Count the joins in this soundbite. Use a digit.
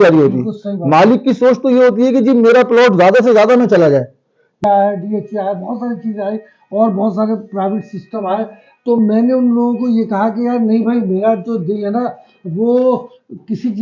1